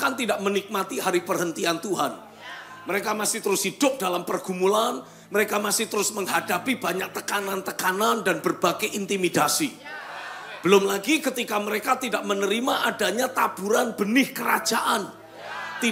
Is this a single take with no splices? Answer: yes; 0 cuts

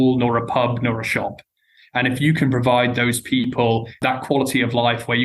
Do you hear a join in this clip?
no; 0 cuts

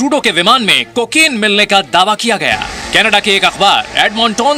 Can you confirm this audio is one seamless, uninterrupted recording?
yes; 0 cuts

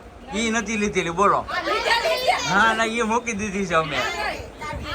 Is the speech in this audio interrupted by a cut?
no; 0 cuts

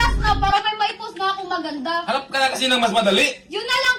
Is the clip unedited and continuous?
yes; 0 cuts

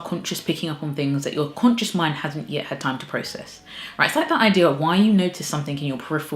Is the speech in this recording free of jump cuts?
yes; 0 cuts

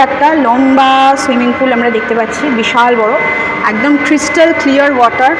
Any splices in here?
no; 0 cuts

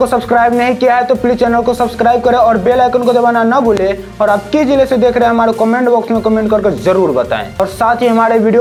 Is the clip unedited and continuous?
yes; 0 cuts

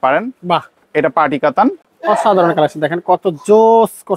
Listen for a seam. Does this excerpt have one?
yes; 1 cut; at 1.9 s

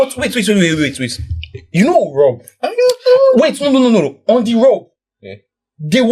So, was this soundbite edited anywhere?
no; 0 cuts

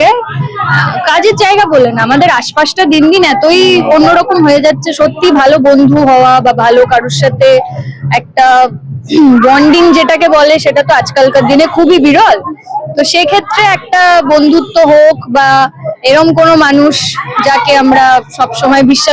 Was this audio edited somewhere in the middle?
no; 0 cuts

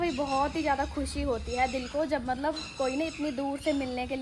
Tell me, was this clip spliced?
no; 0 cuts

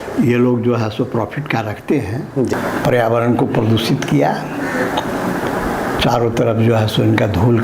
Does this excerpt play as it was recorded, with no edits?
no; 1 cut; at 2.5 s

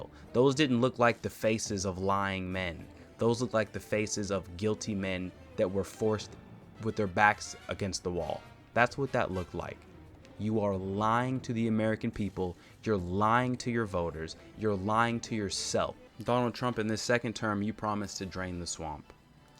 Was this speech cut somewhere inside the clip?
yes; 1 cut; at 16.0 s

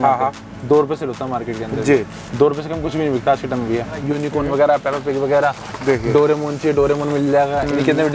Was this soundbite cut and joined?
yes; 1 cut; at 4.0 s

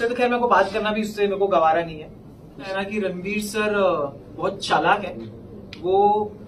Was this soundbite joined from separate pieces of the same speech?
yes; 1 cut; at 2.7 s

